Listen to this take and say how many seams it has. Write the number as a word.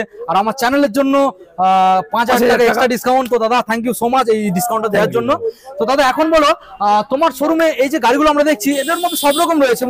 zero